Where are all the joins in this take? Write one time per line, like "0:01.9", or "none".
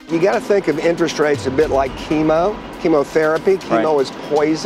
0:02.7